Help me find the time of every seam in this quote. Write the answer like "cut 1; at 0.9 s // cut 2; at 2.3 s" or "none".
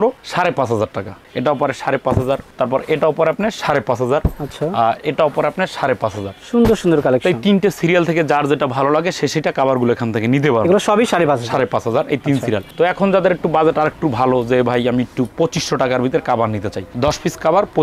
none